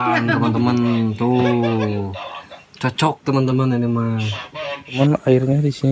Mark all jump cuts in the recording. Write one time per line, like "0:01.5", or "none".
0:05.0